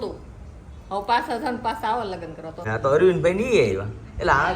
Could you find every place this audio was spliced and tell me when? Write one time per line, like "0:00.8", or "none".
0:02.7